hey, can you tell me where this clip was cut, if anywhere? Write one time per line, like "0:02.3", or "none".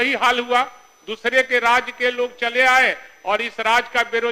none